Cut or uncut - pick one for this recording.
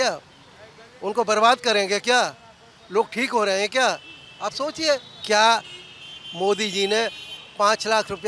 cut